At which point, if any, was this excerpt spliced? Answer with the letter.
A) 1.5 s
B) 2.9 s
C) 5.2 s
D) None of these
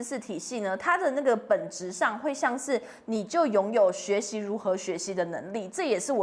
D